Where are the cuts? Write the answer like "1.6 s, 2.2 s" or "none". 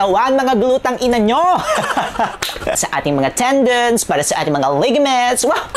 2.8 s